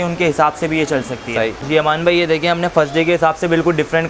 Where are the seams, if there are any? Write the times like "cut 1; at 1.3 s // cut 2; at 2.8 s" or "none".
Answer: cut 1; at 1.6 s